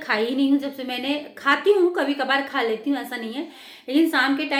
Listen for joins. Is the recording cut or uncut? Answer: uncut